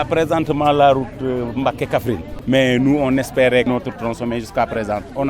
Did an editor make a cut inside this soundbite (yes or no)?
yes